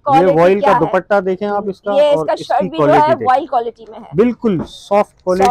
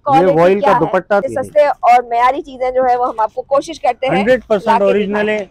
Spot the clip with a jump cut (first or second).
second